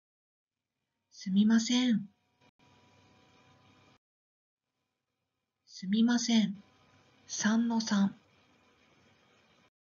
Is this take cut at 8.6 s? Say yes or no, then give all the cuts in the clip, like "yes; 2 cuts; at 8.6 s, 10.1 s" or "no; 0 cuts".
yes; 1 cut; at 8.6 s